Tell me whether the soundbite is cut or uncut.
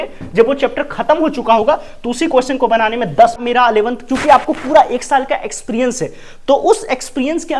cut